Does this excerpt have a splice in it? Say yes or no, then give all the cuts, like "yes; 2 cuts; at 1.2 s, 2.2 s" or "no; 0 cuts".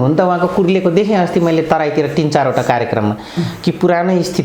no; 0 cuts